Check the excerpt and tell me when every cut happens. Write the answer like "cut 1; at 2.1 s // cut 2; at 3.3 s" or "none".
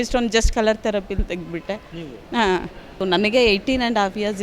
cut 1; at 2.9 s